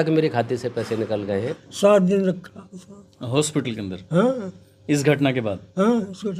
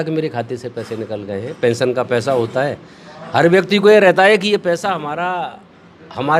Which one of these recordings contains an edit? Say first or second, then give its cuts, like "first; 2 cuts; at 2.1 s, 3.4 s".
first; 1 cut; at 1.5 s